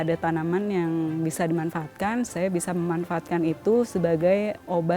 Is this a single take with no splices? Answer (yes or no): no